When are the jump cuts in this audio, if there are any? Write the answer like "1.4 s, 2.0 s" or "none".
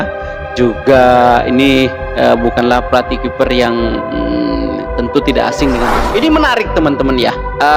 5.9 s